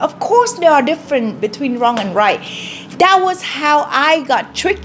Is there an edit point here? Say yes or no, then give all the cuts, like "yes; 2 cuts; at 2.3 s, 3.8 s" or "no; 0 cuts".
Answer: no; 0 cuts